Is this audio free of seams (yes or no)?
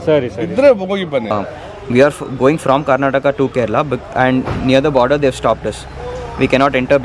no